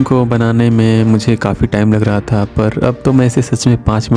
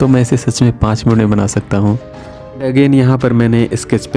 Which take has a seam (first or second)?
second